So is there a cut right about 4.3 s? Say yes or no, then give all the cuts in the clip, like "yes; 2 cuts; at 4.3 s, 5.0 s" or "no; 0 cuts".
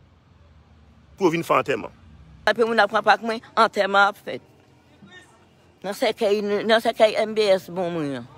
no; 1 cut; at 2.4 s